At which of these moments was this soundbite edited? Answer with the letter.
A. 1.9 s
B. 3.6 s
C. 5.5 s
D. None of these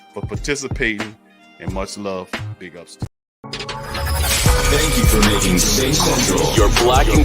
B